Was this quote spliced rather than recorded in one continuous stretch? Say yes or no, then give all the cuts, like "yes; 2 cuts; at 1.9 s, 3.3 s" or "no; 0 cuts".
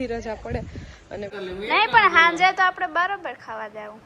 yes; 1 cut; at 1.3 s